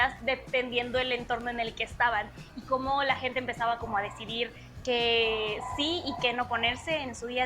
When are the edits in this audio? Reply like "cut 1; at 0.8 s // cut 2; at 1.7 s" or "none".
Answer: none